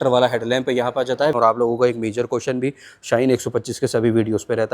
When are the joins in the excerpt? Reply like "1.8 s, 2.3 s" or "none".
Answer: 1.4 s